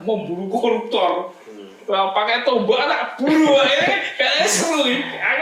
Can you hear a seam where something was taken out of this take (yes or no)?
no